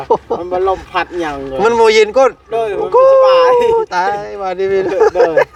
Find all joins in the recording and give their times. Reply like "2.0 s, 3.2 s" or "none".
none